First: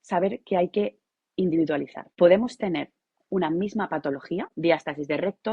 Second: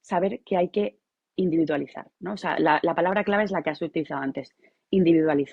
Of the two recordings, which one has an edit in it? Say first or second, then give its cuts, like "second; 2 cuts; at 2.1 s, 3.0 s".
first; 2 cuts; at 2.0 s, 4.5 s